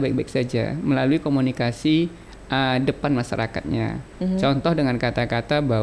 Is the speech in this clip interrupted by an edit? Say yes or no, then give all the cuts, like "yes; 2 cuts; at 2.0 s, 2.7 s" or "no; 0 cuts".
no; 0 cuts